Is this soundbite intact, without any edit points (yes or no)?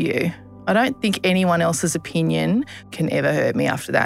no